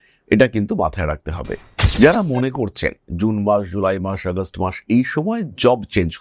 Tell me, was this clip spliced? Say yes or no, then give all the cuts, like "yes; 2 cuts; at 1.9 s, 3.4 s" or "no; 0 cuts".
yes; 1 cut; at 1.8 s